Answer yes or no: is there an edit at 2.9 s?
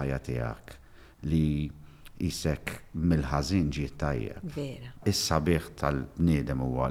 no